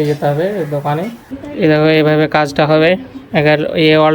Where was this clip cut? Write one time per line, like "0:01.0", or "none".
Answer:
0:01.3